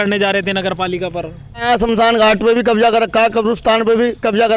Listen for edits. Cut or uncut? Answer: cut